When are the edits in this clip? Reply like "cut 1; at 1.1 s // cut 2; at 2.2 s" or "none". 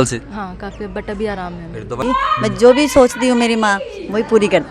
cut 1; at 2.0 s